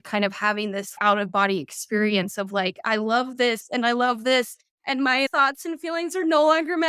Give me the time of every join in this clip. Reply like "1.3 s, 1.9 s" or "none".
0.9 s, 5.3 s